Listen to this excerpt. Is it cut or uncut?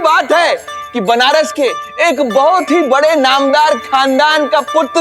uncut